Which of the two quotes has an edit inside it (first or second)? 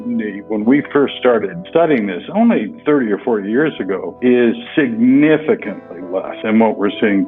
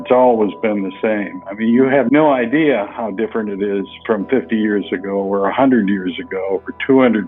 first